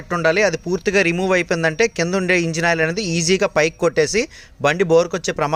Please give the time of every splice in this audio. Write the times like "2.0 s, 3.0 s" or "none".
none